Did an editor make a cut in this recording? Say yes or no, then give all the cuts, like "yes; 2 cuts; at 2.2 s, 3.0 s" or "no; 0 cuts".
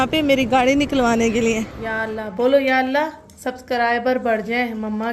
yes; 1 cut; at 2.2 s